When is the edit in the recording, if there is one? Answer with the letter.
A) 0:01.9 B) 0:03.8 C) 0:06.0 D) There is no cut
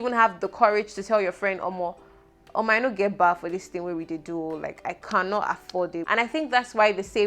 C